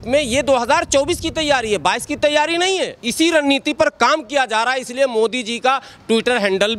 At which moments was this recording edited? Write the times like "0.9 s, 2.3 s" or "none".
3.0 s